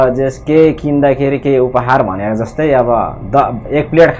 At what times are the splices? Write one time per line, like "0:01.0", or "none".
none